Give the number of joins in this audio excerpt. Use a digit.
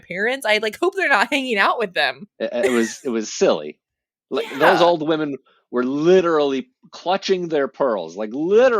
1